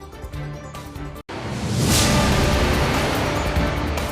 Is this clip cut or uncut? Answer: cut